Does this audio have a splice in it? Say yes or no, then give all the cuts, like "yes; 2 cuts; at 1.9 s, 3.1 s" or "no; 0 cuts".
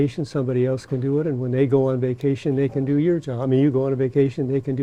no; 0 cuts